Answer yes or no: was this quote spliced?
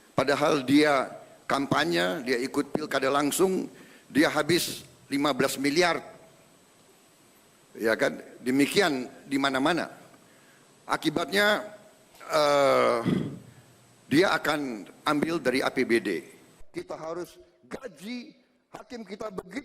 yes